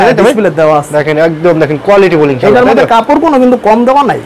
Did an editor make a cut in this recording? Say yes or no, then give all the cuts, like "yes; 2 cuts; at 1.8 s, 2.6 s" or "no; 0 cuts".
no; 0 cuts